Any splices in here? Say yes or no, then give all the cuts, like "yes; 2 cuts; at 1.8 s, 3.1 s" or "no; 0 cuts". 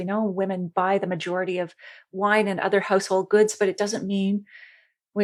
no; 0 cuts